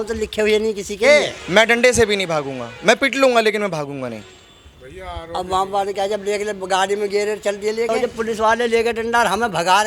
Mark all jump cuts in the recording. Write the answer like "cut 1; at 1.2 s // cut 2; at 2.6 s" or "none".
cut 1; at 1.4 s // cut 2; at 7.9 s